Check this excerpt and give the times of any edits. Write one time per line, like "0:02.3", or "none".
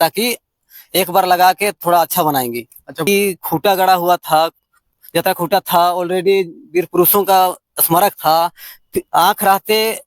0:03.1